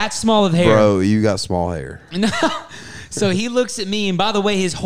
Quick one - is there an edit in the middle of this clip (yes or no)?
no